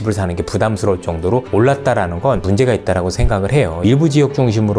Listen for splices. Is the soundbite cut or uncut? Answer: cut